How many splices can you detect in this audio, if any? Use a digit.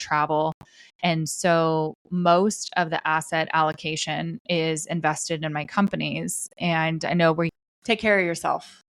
1